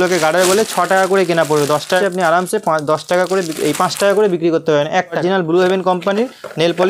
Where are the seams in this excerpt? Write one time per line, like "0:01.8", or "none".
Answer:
0:02.0
0:05.2